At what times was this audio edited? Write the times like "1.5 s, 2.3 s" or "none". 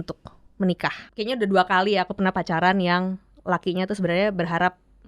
1.0 s